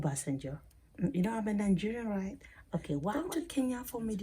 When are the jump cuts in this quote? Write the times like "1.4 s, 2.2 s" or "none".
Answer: 3.1 s